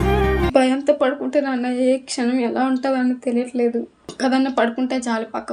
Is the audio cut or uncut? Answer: cut